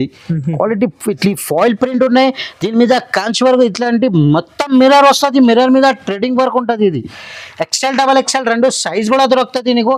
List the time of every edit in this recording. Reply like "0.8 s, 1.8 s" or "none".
none